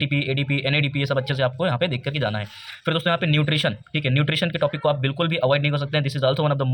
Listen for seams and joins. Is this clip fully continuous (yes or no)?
yes